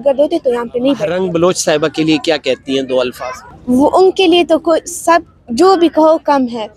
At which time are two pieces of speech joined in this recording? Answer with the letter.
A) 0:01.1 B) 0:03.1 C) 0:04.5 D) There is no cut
A